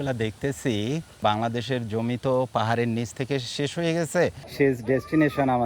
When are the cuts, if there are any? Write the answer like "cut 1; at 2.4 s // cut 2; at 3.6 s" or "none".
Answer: cut 1; at 1.2 s // cut 2; at 4.4 s